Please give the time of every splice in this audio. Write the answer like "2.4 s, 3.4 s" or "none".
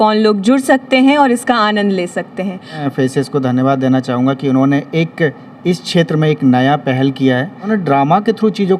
2.8 s, 7.6 s